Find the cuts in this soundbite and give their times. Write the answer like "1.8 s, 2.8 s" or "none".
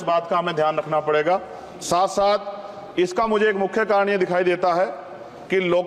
none